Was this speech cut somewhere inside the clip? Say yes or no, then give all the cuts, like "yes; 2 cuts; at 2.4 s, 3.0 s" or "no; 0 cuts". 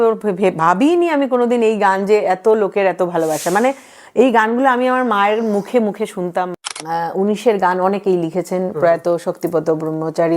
yes; 1 cut; at 6.5 s